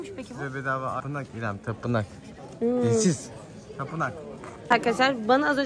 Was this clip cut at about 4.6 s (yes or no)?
yes